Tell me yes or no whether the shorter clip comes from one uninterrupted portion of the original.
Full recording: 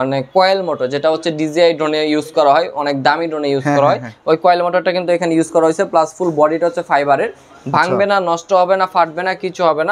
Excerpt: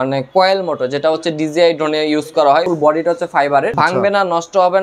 no